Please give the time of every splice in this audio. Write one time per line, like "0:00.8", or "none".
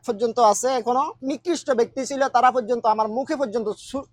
0:01.2